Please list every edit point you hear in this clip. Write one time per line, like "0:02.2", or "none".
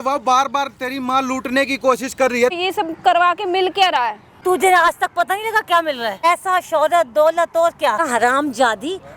0:02.6
0:04.3
0:06.2
0:08.1